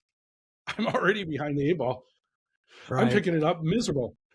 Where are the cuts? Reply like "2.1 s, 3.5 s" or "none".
none